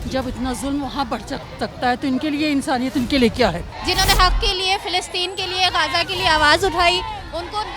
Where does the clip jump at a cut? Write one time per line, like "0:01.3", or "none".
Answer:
0:03.7